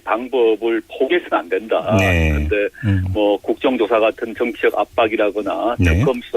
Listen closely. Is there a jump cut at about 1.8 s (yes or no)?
yes